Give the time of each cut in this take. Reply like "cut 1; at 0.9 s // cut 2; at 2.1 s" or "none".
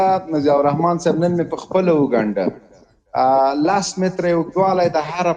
none

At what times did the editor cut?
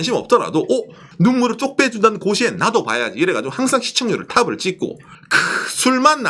cut 1; at 1.0 s // cut 2; at 5.1 s

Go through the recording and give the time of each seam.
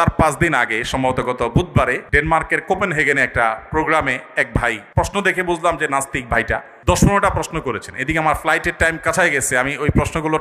cut 1; at 2.0 s // cut 2; at 4.8 s // cut 3; at 6.7 s

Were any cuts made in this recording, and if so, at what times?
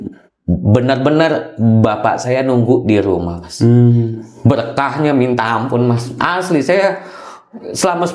none

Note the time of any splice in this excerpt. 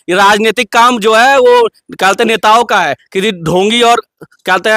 none

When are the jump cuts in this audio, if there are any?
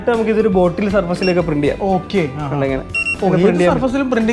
none

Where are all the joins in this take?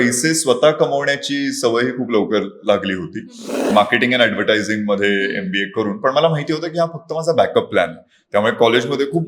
cut 1; at 3.7 s

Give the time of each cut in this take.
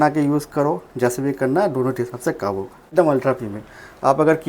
cut 1; at 2.9 s

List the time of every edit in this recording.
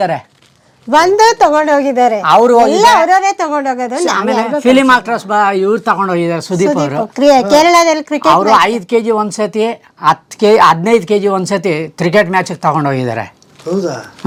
none

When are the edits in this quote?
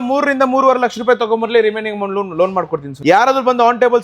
cut 1; at 2.9 s

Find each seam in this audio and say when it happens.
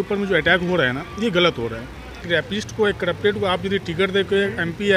cut 1; at 2.2 s

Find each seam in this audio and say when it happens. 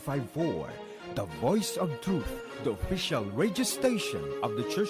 none

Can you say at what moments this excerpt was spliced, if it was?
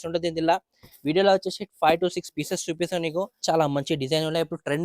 cut 1; at 3.4 s

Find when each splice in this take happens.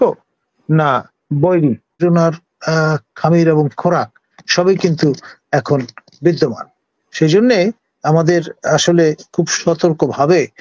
cut 1; at 2.0 s

